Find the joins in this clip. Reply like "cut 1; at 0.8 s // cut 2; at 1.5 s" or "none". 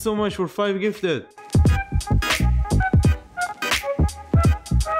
cut 1; at 1.3 s